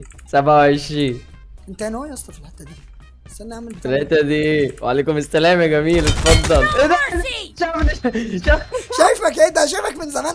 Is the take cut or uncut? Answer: uncut